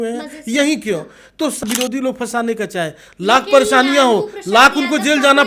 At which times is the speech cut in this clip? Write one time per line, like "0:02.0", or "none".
0:01.6